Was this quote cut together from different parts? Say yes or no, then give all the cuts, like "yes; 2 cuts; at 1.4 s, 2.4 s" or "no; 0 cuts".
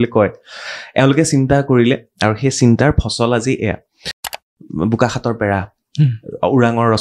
yes; 1 cut; at 4.3 s